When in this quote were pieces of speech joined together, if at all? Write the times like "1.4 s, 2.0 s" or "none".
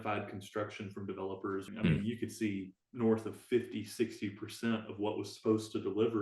1.7 s